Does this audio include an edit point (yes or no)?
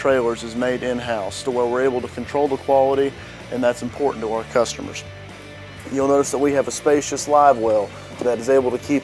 no